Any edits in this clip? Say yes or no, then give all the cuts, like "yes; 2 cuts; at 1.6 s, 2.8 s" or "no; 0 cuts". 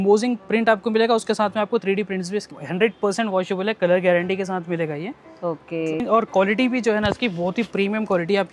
yes; 2 cuts; at 2.6 s, 6.0 s